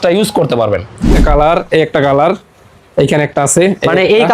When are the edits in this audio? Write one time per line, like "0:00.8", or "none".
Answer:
0:01.2